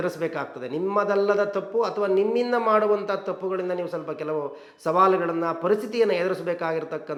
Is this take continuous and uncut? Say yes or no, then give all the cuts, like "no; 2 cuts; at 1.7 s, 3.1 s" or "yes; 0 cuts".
yes; 0 cuts